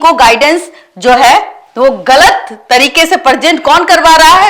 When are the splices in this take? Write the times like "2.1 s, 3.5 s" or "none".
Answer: none